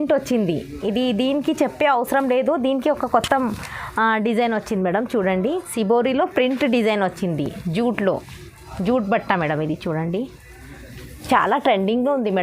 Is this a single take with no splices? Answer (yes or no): yes